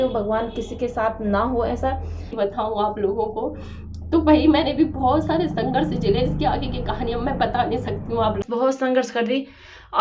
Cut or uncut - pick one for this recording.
cut